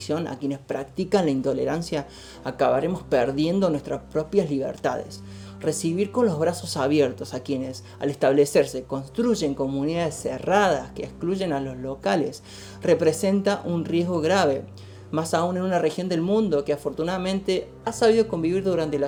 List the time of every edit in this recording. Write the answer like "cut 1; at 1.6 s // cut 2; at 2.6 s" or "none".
none